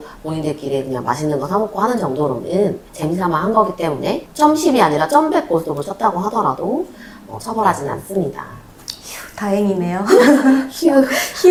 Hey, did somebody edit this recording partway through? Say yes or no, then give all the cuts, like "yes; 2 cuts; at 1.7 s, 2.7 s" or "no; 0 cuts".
no; 0 cuts